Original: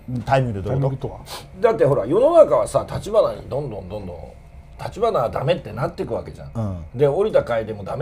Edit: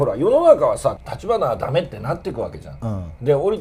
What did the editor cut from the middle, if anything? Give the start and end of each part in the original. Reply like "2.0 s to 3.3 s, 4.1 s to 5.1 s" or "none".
3.0 s to 4.8 s